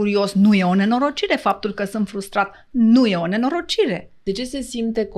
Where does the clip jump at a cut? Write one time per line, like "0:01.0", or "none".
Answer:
0:04.1